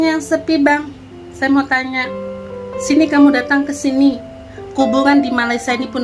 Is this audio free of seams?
yes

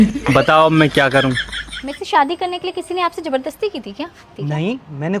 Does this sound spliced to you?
yes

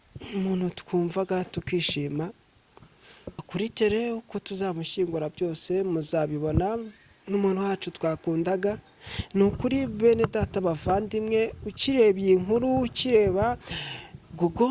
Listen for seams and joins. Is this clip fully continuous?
no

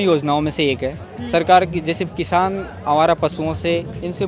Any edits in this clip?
no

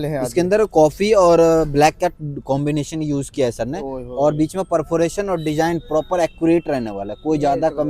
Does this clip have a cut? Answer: no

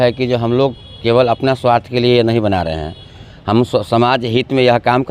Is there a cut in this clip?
no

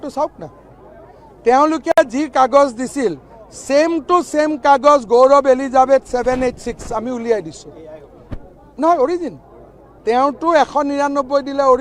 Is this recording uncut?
yes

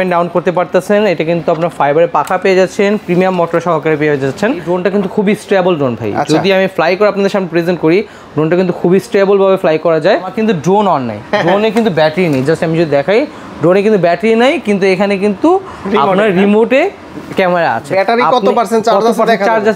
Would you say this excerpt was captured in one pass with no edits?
no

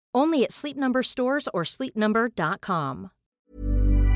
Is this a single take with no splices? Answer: no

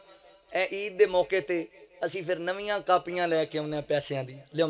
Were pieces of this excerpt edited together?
no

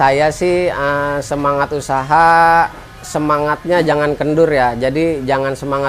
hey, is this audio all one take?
yes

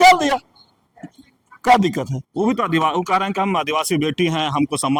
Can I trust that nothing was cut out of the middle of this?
yes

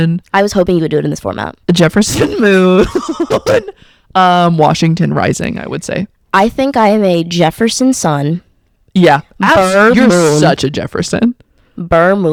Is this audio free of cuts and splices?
yes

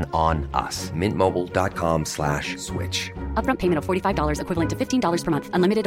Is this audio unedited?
yes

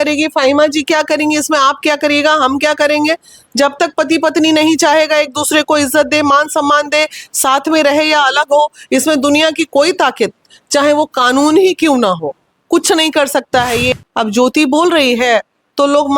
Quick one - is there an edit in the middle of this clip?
yes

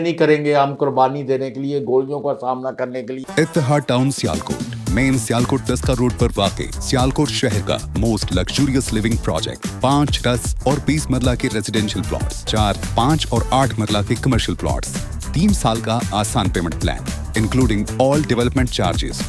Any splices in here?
yes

